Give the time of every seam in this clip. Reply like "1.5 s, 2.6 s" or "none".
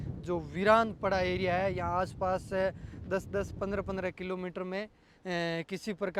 none